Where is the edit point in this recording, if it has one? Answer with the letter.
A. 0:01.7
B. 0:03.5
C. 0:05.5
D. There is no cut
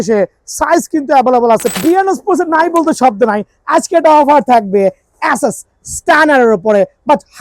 A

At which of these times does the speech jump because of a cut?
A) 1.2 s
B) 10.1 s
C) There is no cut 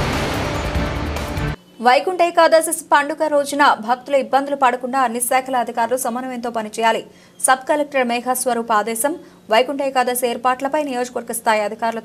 A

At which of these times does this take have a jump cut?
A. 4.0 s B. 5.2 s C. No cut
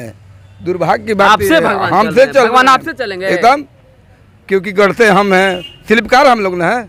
C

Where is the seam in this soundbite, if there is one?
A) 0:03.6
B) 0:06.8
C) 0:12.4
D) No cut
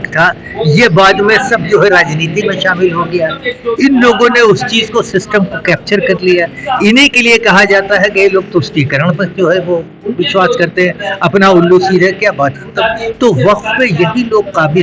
D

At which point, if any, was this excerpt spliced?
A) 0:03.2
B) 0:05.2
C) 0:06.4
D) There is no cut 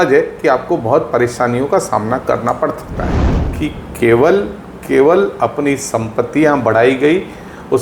A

